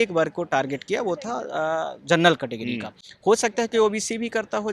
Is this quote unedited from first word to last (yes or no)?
yes